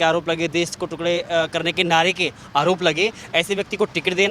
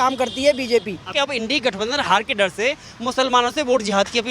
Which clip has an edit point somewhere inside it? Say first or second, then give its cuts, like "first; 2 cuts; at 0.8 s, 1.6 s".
second; 1 cut; at 1.1 s